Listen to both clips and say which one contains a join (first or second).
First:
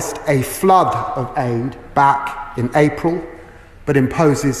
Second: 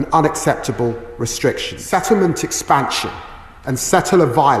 second